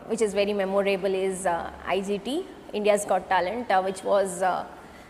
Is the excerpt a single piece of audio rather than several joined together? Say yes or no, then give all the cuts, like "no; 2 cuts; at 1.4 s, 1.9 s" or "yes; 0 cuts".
yes; 0 cuts